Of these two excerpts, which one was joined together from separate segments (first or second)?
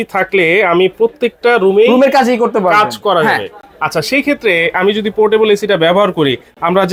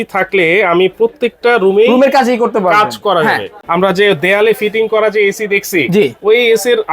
second